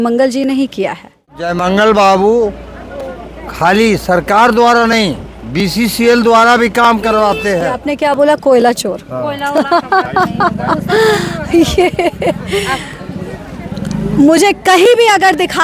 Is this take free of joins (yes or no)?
no